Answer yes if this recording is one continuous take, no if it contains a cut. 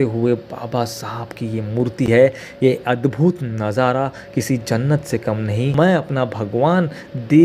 yes